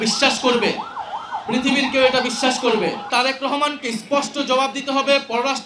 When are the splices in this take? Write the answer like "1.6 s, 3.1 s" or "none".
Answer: 3.1 s